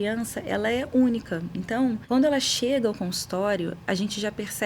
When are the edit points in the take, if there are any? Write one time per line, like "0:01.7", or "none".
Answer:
0:02.0